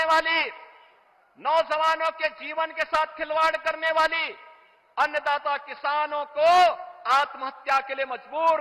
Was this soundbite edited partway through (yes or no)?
no